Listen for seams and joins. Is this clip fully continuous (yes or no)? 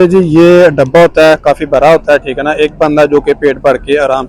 yes